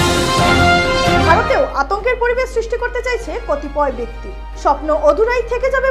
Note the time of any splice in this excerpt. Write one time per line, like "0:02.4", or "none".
0:01.0

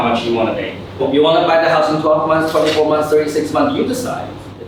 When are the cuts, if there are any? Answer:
0:01.0

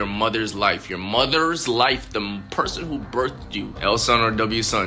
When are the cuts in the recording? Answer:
0:03.7

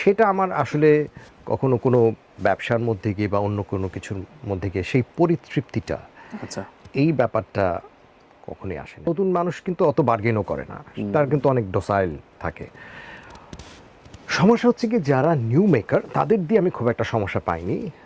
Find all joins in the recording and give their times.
0:09.1

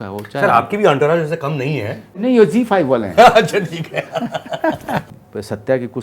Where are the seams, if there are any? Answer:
0:02.2
0:05.1

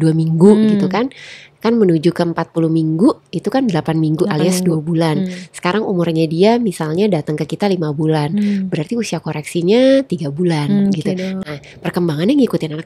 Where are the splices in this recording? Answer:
none

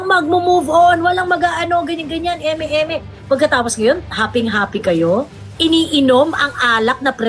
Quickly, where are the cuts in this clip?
none

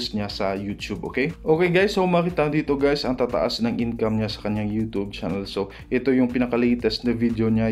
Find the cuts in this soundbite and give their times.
none

